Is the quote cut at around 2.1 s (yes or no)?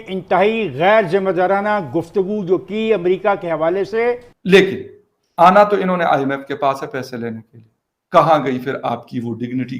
no